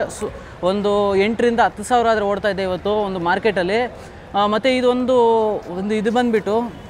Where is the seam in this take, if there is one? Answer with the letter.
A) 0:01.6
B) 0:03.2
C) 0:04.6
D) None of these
D